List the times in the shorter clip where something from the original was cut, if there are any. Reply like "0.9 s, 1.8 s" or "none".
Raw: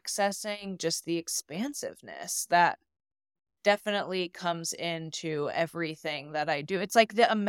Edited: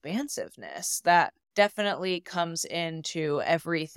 1.4 s